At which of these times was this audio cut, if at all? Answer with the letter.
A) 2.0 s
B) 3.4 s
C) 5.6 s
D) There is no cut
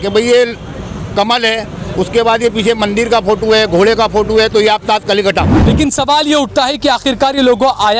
C